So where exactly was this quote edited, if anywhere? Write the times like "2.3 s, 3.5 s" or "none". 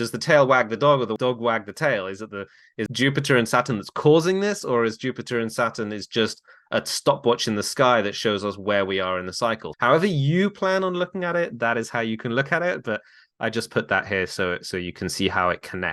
1.1 s, 2.8 s, 9.7 s